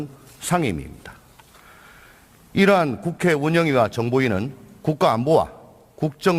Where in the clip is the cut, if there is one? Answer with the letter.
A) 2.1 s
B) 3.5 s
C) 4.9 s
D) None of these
B